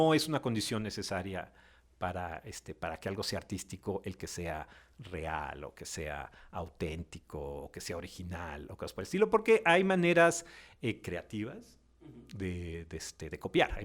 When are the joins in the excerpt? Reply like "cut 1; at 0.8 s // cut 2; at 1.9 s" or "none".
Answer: none

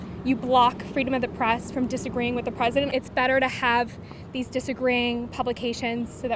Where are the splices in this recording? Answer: cut 1; at 2.9 s

